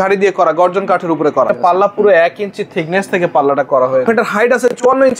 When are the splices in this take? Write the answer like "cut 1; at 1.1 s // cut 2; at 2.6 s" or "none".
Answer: cut 1; at 1.5 s // cut 2; at 4.1 s